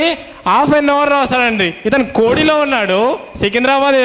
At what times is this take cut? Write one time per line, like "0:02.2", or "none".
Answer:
none